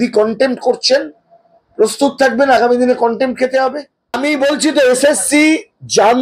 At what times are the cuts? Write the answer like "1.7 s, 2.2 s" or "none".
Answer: 4.2 s

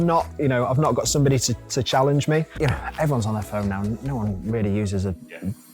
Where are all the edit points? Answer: 2.5 s

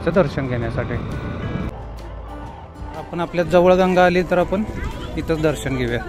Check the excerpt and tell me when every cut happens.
1.7 s, 3.1 s

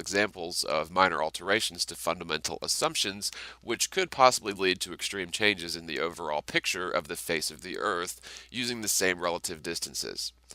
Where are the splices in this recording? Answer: none

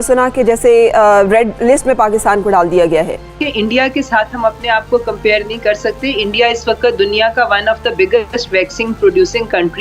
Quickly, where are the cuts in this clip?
3.3 s

